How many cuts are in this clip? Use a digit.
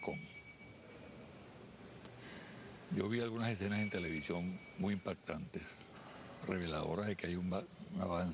1